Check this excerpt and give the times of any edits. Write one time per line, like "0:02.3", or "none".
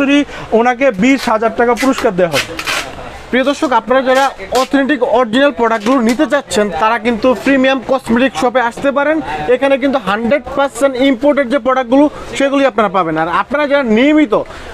none